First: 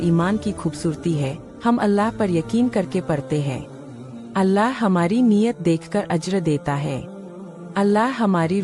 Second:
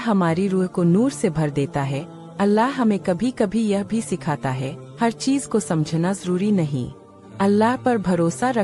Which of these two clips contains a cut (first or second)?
first